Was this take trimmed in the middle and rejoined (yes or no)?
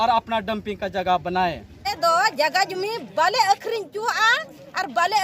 yes